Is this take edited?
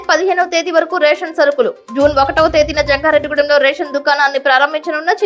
no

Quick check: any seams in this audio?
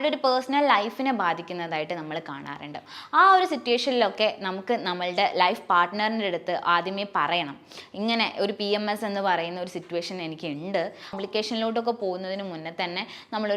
yes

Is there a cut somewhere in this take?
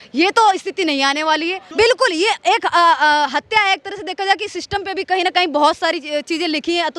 yes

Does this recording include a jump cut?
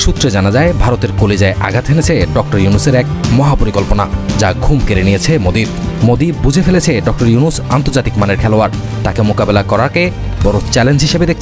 no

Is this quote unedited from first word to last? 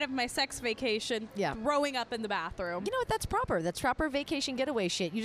yes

